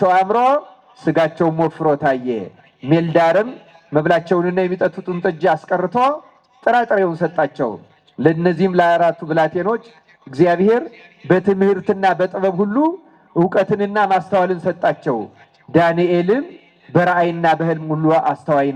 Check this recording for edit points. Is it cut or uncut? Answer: uncut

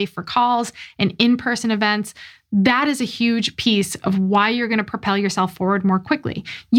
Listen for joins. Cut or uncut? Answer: uncut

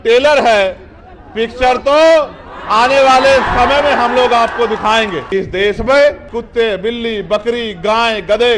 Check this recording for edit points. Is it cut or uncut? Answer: cut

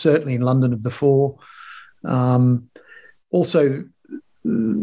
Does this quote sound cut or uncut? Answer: uncut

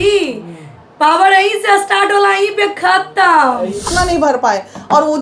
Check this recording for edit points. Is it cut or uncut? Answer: cut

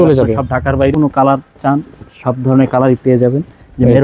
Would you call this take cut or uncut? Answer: cut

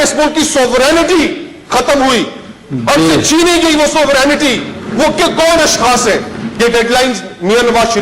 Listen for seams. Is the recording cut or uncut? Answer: cut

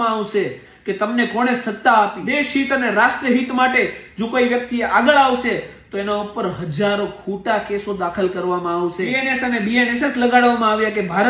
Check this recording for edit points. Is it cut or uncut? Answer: cut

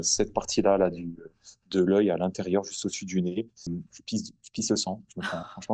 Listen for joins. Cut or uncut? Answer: cut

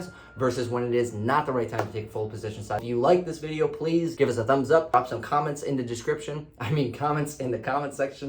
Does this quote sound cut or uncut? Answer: cut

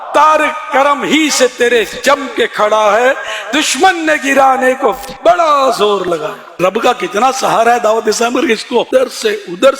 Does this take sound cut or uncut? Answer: cut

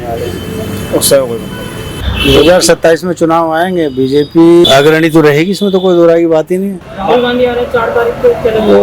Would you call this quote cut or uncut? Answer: cut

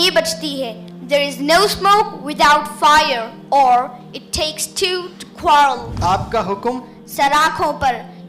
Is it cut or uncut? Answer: cut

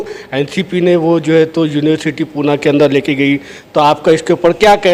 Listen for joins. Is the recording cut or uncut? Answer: uncut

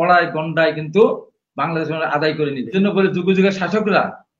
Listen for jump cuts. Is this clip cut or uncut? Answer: cut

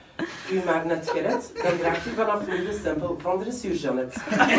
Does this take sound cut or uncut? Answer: uncut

